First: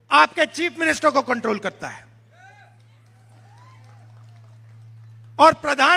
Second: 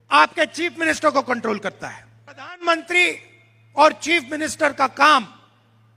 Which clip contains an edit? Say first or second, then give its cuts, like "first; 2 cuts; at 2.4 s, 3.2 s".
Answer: second; 1 cut; at 2.6 s